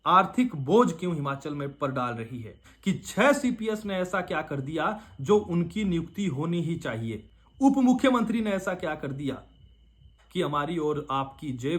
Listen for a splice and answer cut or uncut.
cut